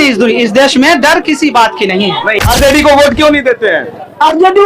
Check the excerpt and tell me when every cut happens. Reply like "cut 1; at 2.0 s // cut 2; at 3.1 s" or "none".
cut 1; at 2.4 s